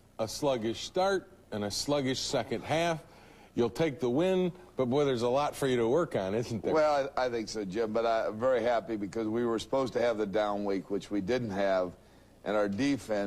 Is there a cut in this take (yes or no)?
yes